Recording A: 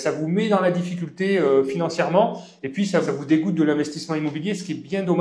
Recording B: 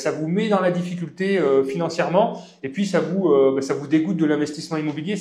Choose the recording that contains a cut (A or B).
A